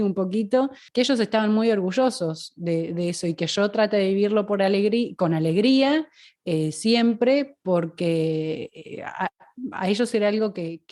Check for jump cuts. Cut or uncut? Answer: uncut